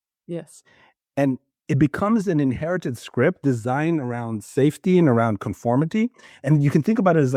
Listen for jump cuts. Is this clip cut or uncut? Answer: uncut